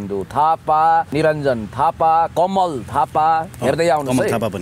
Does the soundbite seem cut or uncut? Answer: cut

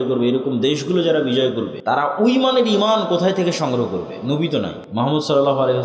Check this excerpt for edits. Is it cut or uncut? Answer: cut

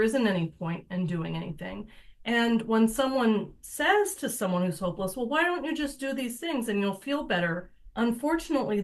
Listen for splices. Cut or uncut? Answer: uncut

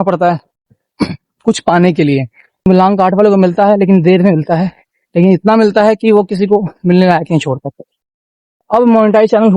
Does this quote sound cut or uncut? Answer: cut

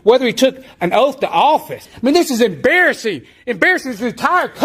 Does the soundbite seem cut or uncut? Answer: cut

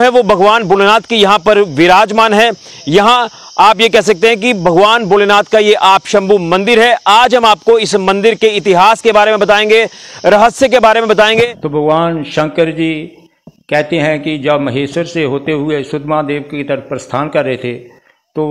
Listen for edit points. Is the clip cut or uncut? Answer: cut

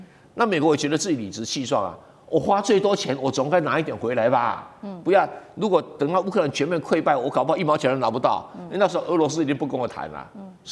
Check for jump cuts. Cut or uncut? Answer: uncut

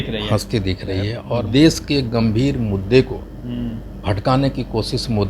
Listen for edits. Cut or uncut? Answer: cut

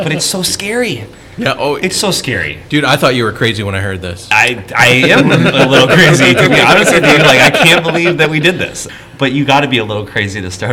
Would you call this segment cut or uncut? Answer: cut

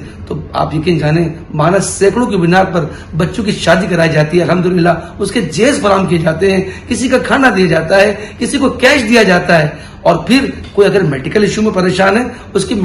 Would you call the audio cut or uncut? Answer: uncut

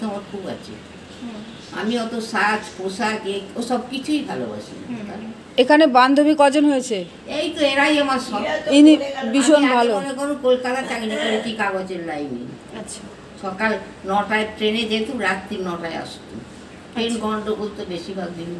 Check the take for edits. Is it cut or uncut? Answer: uncut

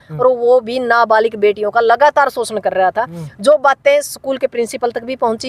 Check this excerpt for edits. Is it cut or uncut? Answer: uncut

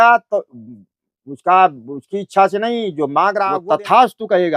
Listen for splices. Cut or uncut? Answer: cut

